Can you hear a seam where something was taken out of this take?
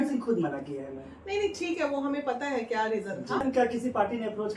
yes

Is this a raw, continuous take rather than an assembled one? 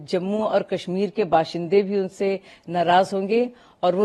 yes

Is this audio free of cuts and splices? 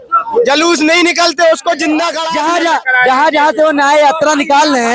no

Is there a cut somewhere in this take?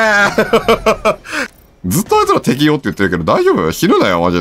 yes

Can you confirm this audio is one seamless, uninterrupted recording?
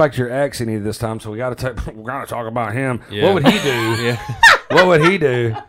yes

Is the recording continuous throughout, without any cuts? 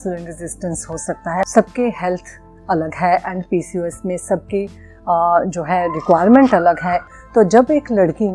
no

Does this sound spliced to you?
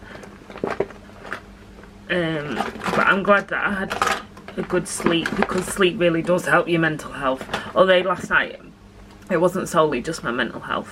no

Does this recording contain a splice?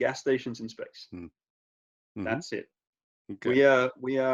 no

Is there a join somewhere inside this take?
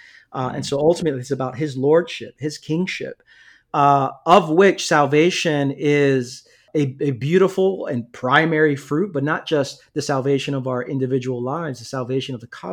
yes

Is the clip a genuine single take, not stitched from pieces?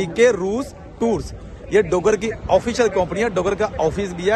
yes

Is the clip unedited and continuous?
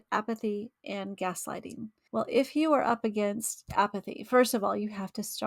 no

